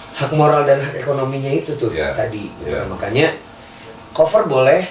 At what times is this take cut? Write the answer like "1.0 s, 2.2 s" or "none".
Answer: none